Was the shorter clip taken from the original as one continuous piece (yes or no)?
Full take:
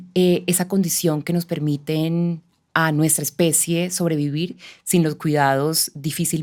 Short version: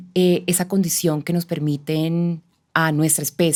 yes